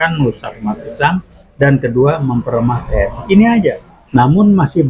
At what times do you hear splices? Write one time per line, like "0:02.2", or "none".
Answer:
0:03.9